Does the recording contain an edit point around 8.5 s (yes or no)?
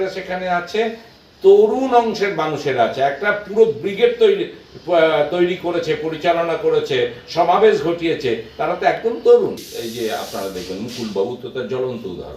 no